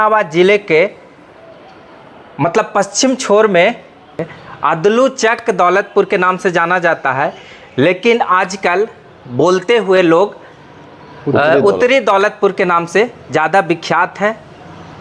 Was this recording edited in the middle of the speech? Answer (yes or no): no